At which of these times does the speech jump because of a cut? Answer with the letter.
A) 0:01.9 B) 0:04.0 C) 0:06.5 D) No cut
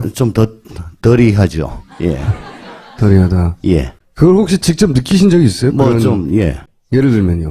B